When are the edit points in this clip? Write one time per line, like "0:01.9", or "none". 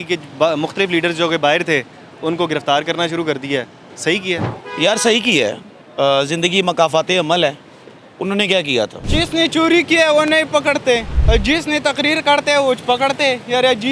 0:04.6
0:09.0
0:11.1

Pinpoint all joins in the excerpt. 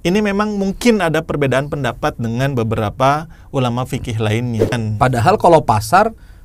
0:04.7

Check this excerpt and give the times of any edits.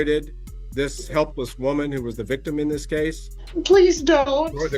0:03.3

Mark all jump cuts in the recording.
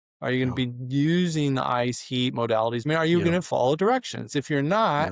0:02.8

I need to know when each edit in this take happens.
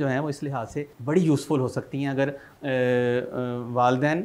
0:00.9
0:02.5

